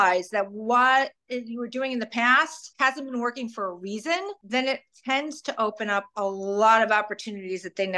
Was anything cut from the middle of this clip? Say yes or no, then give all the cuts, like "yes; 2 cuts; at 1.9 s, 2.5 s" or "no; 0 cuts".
yes; 2 cuts; at 2.6 s, 4.4 s